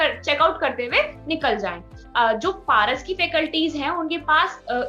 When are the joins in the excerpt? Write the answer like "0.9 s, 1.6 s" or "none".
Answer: 2.0 s